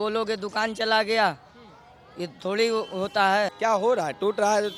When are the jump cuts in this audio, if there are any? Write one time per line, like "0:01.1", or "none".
0:03.5